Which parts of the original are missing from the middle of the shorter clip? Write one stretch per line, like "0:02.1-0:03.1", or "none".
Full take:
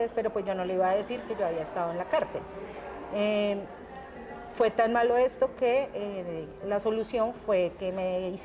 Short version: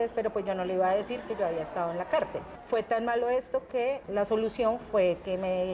0:02.5-0:04.4
0:05.9-0:06.6